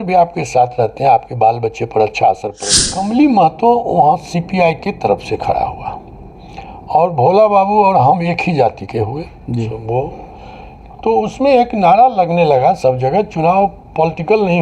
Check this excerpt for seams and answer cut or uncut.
cut